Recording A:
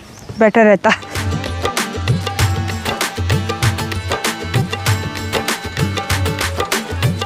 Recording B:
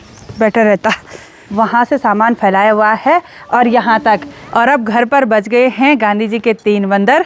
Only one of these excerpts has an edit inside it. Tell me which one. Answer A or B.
B